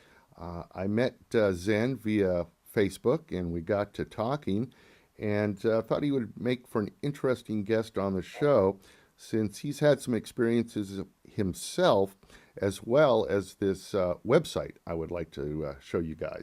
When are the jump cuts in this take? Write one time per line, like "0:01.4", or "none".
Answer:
0:01.8